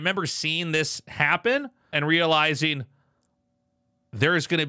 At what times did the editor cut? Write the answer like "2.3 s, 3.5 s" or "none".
2.0 s